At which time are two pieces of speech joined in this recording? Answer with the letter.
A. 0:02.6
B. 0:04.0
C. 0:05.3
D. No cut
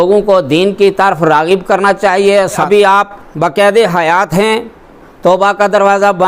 A